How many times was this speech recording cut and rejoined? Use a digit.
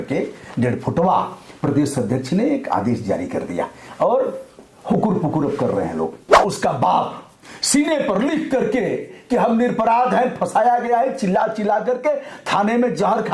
1